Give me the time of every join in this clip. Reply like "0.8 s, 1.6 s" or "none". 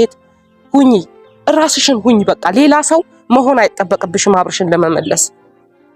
none

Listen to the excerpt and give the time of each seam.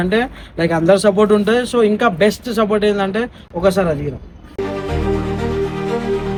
none

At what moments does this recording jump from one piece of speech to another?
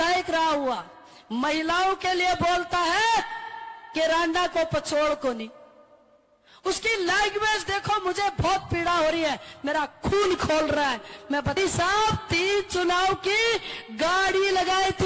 11.6 s

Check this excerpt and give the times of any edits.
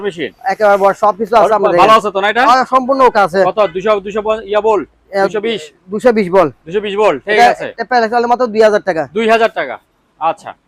none

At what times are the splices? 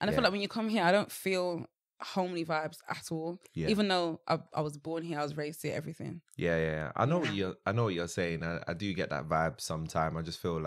none

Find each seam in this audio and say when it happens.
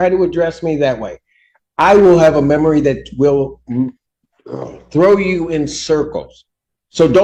none

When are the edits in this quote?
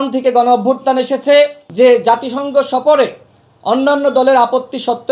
1.6 s

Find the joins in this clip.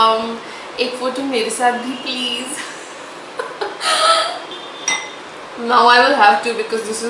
4.5 s

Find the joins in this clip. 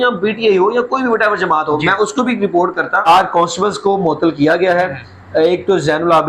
3.1 s

